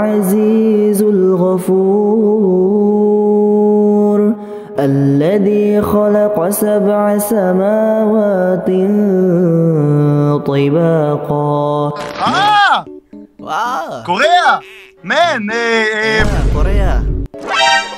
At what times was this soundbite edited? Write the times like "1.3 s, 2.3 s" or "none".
12.1 s